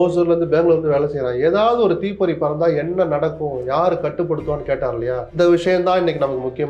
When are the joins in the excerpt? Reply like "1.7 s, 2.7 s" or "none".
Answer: 5.3 s

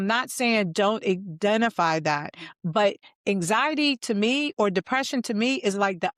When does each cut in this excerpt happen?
none

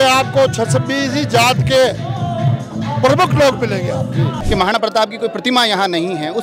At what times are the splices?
4.4 s

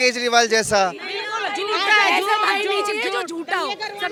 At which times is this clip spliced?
none

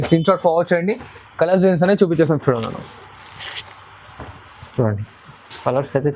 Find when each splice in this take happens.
none

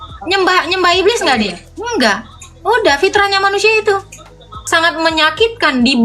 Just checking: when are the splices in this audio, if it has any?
4.6 s

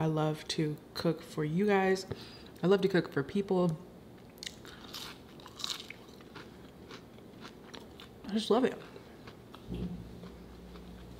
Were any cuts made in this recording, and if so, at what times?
none

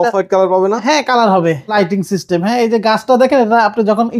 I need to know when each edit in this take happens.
1.7 s

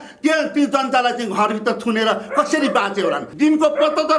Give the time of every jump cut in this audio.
3.3 s

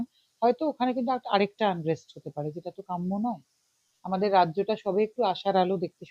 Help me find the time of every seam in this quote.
3.9 s

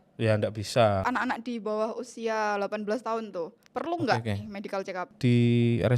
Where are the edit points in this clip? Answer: 1.1 s, 5.1 s

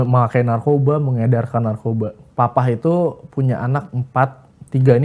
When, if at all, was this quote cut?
2.2 s

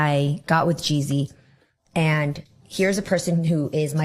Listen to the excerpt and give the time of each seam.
1.3 s

